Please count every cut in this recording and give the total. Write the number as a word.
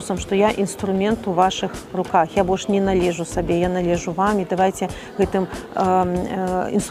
zero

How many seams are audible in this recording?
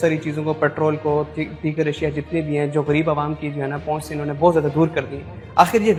zero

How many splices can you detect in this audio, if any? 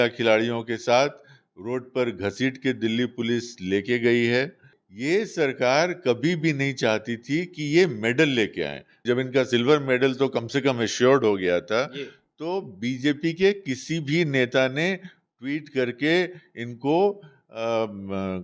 one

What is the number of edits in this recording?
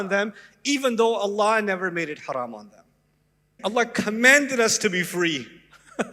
one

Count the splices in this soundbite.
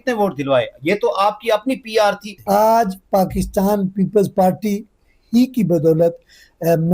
one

